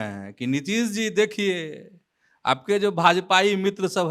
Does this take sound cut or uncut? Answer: uncut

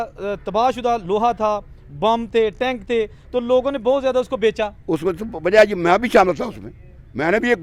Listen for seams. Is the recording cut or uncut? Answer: uncut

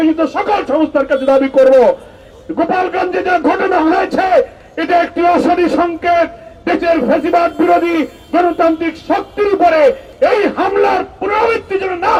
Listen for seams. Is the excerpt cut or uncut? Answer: uncut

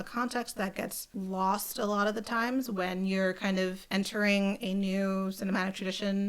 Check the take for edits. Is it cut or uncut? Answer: cut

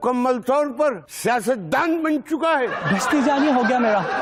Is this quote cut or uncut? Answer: uncut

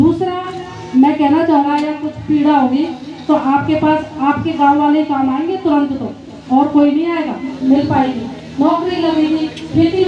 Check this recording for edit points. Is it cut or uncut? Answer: cut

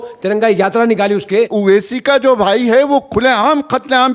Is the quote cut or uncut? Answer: cut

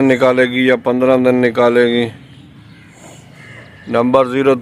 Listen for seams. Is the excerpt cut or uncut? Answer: uncut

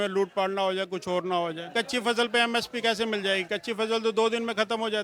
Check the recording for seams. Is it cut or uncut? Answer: cut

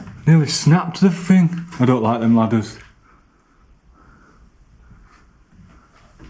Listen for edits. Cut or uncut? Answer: uncut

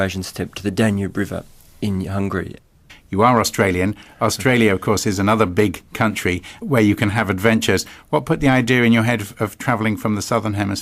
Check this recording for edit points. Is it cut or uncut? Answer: cut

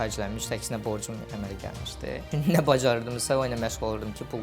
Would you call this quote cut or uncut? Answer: cut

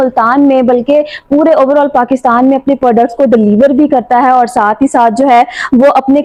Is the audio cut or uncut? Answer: uncut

